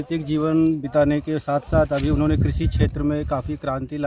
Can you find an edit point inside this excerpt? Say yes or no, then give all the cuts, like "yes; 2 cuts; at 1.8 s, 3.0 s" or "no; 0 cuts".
no; 0 cuts